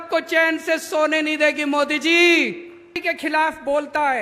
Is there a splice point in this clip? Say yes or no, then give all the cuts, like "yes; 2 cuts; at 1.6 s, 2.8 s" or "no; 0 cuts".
yes; 1 cut; at 3.0 s